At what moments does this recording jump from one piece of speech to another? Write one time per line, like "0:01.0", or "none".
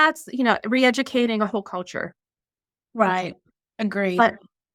none